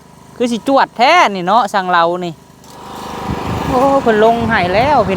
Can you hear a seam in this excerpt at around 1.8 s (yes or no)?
no